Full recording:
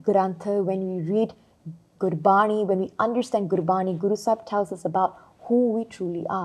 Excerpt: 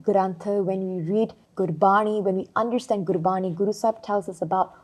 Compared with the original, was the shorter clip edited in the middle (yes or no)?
yes